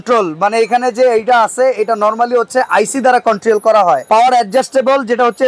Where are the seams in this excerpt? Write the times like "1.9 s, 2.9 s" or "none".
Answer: none